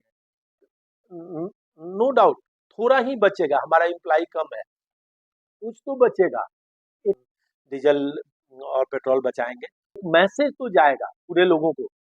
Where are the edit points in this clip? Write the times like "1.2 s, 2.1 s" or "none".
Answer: 7.2 s, 10.0 s